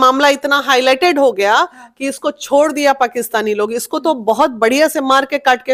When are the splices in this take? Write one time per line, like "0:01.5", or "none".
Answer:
none